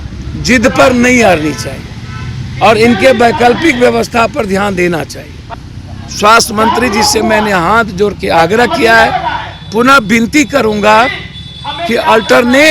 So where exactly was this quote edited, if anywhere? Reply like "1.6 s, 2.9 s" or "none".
5.7 s

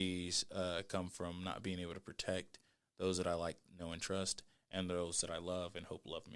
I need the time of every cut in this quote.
none

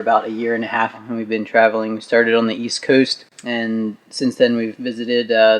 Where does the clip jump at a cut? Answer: 1.1 s, 3.3 s

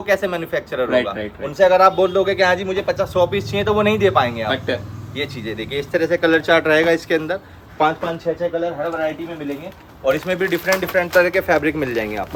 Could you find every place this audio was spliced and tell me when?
none

